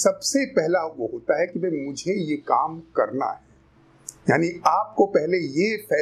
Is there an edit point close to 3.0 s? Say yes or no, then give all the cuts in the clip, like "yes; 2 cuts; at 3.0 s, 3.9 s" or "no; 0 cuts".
no; 0 cuts